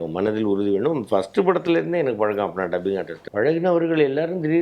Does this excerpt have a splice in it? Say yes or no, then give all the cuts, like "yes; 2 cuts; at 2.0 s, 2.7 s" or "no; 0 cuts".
yes; 1 cut; at 3.2 s